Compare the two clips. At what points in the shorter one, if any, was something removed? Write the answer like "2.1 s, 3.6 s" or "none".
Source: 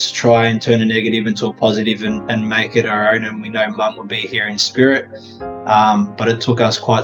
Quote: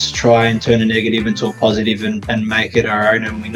none